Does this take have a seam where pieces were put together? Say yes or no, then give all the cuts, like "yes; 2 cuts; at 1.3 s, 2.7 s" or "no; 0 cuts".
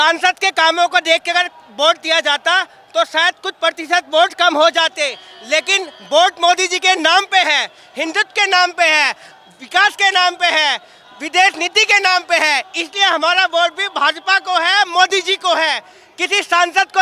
no; 0 cuts